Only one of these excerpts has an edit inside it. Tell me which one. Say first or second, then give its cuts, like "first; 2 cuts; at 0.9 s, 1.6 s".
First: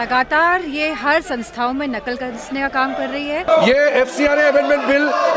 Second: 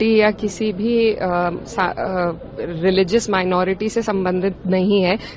first; 1 cut; at 3.5 s